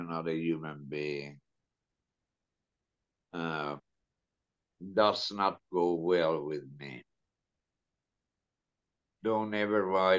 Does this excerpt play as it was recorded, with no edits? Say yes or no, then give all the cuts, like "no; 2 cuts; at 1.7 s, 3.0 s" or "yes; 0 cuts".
yes; 0 cuts